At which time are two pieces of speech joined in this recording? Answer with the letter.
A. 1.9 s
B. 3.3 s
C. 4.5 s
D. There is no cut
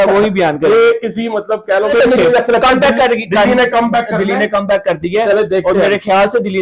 A